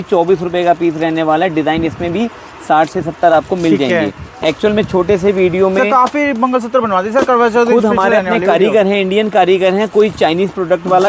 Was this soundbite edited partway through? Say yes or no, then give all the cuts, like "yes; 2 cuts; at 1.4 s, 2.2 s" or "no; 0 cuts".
no; 0 cuts